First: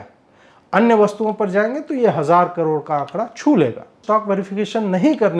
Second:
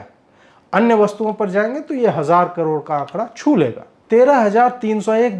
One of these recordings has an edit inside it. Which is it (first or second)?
first